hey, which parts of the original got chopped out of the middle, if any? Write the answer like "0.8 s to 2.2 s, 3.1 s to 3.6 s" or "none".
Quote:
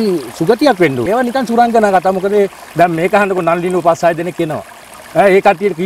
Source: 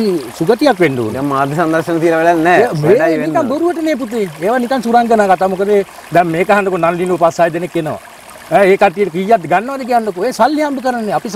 1.0 s to 4.4 s